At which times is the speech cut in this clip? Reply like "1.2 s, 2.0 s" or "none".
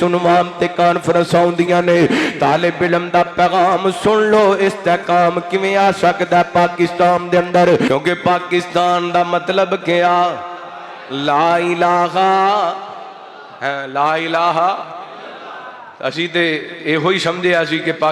7.9 s